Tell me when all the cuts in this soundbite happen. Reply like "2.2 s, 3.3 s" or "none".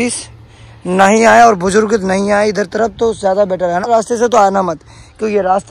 3.8 s